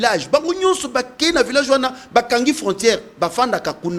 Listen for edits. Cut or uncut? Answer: uncut